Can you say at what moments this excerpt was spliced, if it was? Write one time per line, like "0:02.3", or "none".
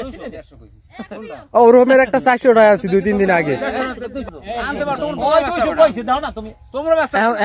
0:04.3

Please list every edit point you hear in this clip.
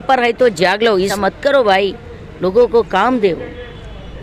0:01.1

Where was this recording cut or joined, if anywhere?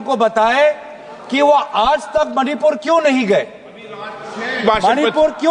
none

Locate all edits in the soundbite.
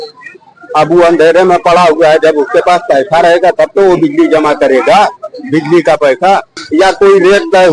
0:06.6

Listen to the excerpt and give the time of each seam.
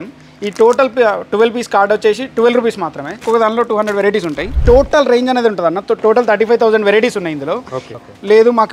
0:03.2
0:04.5
0:07.8

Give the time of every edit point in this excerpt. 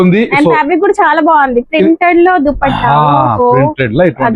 none

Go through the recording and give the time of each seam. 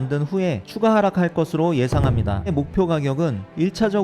0:02.5

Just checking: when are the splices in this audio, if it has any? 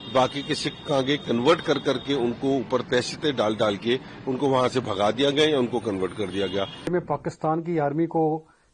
0:06.9

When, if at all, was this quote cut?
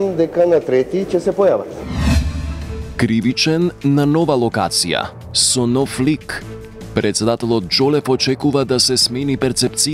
0:01.8

